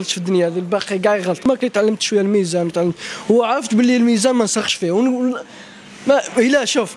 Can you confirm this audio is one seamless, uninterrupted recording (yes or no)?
no